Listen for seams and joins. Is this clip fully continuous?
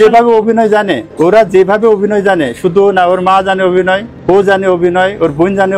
no; 2 cuts; at 1.0 s, 4.1 s

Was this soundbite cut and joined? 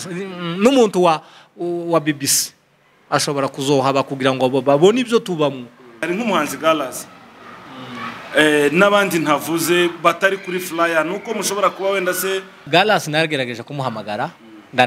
yes; 2 cuts; at 6.0 s, 12.6 s

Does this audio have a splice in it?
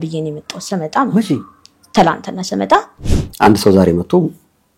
yes; 1 cut; at 2.9 s

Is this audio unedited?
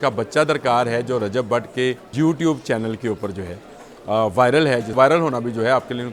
no; 2 cuts; at 2.0 s, 4.9 s

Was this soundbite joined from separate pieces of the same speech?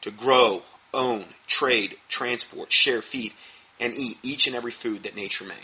yes; 1 cut; at 1.1 s

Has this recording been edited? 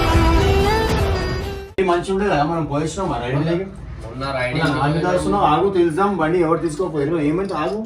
no; 0 cuts

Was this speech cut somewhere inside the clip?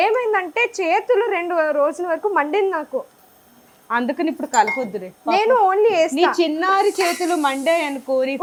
no; 0 cuts

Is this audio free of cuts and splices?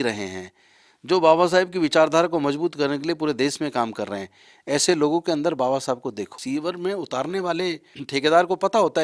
no; 2 cuts; at 6.4 s, 8.0 s

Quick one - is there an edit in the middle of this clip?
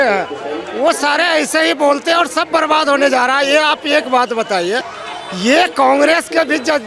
yes; 1 cut; at 5.0 s

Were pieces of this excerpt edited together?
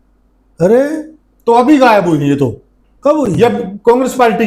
no; 0 cuts

